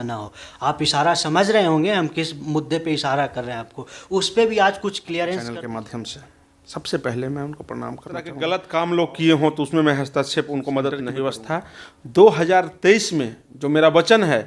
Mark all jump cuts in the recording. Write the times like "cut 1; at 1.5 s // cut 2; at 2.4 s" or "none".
cut 1; at 5.6 s // cut 2; at 8.3 s // cut 3; at 11.1 s